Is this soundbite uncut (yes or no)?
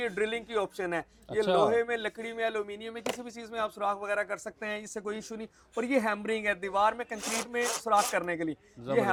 yes